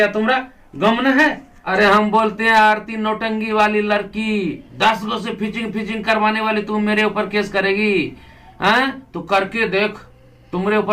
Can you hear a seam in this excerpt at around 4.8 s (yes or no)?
no